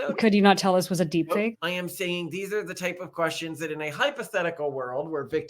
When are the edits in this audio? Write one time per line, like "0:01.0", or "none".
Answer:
0:01.6